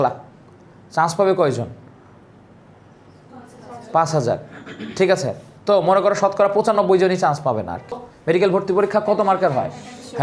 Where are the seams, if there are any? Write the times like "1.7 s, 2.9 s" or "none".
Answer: 8.1 s